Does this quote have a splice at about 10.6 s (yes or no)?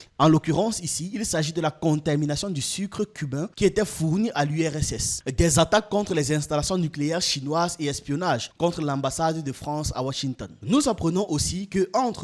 yes